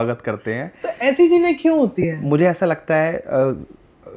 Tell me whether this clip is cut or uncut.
uncut